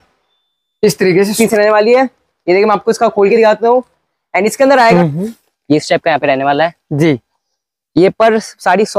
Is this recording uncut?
no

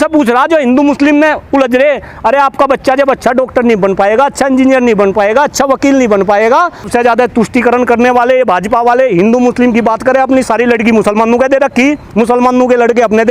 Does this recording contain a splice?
yes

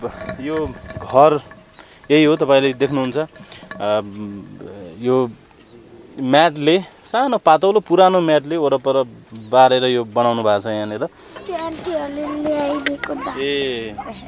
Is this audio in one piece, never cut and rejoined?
no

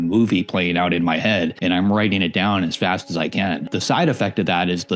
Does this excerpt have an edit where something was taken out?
yes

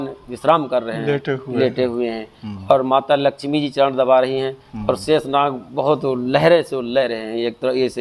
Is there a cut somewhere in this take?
no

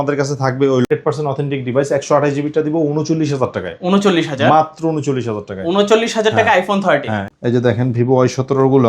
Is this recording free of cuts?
no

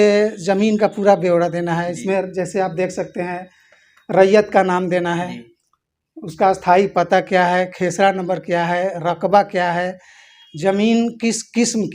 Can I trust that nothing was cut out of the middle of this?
yes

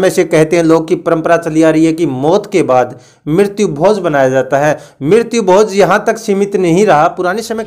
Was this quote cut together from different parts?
no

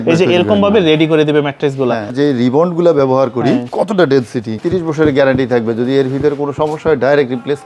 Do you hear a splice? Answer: yes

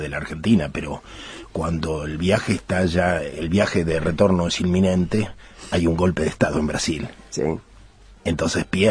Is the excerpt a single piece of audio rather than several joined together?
yes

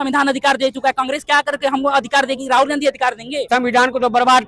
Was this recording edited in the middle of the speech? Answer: yes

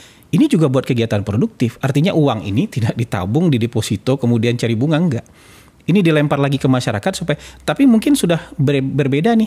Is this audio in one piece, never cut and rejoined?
yes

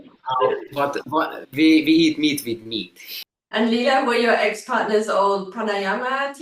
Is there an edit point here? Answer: yes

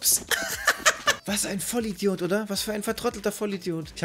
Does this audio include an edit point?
no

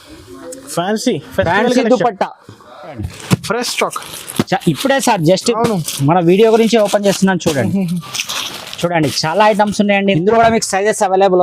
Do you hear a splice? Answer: yes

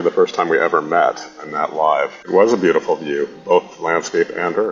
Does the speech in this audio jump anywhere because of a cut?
yes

